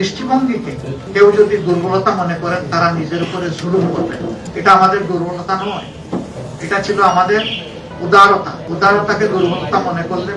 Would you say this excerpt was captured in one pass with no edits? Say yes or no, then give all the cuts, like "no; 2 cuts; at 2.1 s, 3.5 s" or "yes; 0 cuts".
yes; 0 cuts